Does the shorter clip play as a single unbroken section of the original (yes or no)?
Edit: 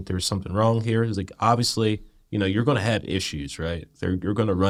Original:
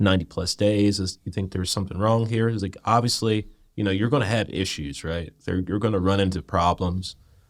yes